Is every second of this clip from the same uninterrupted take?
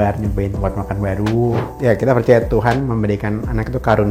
no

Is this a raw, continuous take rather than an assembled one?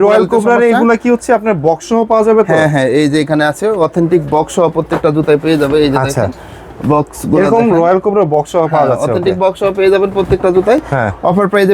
yes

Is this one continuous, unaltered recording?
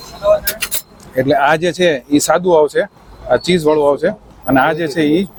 yes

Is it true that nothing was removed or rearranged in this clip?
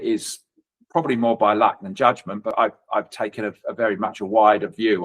no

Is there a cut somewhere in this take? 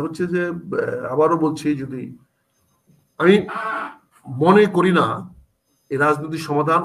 no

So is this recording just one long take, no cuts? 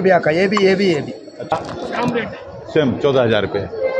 no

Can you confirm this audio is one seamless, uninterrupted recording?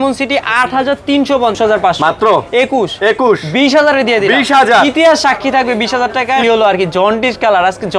no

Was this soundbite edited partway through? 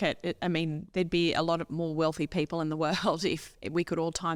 no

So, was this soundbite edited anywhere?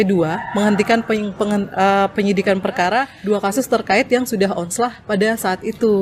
yes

